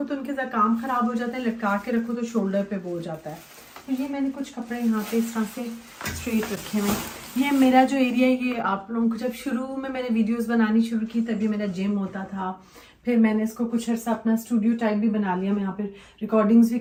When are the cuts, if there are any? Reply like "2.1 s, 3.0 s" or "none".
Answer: none